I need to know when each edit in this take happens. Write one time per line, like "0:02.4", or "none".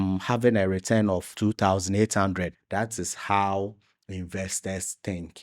0:02.6